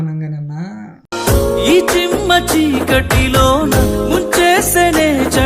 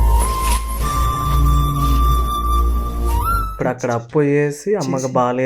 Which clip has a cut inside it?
second; 1 cut; at 3.4 s

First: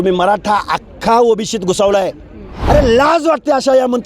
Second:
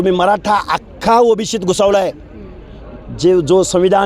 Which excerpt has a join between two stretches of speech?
first; 1 cut; at 2.5 s

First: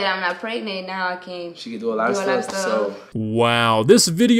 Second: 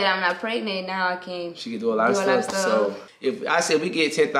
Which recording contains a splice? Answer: second; 1 cut; at 3.0 s

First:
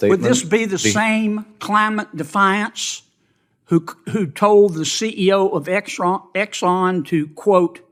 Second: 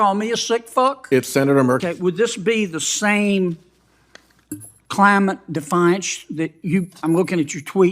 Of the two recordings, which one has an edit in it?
second; 1 cut; at 1.8 s

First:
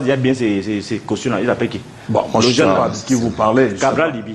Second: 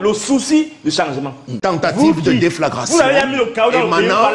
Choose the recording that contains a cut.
second; 1 cut; at 1.6 s

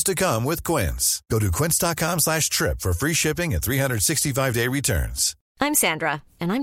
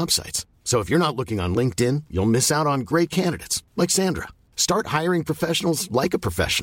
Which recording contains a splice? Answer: first; 1 cut; at 5.3 s

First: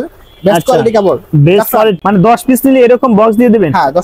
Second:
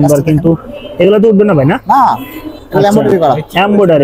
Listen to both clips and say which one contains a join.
first; 1 cut; at 2.0 s

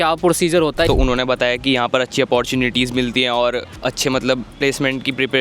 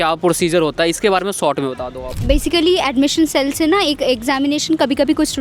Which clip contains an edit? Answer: first; 2 cuts; at 0.9 s, 3.7 s

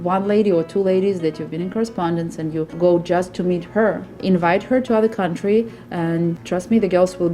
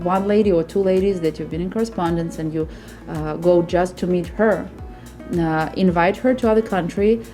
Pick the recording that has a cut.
first; 3 cuts; at 2.7 s, 4.2 s, 6.4 s

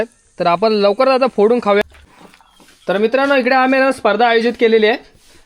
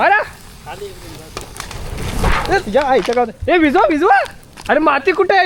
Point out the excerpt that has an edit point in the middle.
first; 1 cut; at 1.8 s

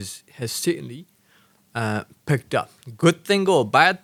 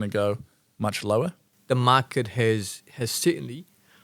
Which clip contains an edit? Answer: second; 1 cut; at 1.5 s

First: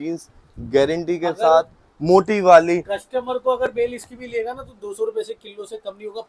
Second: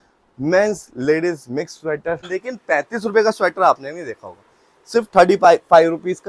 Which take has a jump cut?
second; 1 cut; at 2.3 s

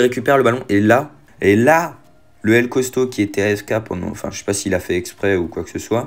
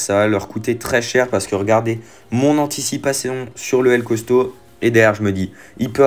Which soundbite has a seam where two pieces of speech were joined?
first; 1 cut; at 1.2 s

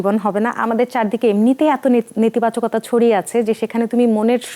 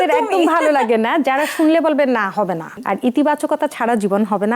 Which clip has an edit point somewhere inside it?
second; 1 cut; at 2.8 s

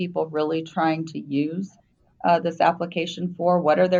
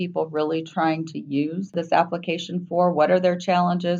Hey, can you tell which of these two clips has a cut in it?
second; 1 cut; at 1.7 s

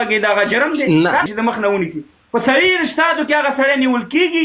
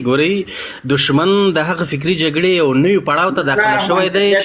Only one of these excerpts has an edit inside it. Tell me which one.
first; 1 cut; at 1.2 s

